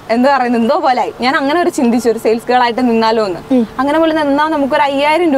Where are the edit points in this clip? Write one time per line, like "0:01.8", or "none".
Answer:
0:01.2